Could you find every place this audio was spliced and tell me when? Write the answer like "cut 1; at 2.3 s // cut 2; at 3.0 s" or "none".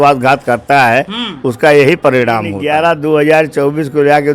cut 1; at 2.5 s